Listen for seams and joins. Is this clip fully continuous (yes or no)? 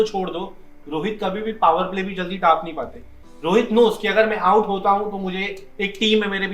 yes